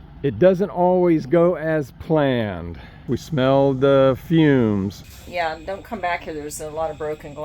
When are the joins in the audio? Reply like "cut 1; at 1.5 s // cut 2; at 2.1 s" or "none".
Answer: cut 1; at 3.1 s // cut 2; at 5.0 s